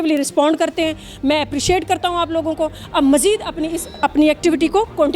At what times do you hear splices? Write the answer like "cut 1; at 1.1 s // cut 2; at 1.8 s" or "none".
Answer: cut 1; at 3.9 s